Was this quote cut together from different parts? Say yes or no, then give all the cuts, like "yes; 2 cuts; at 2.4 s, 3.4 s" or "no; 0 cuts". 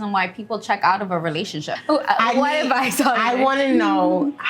yes; 1 cut; at 1.7 s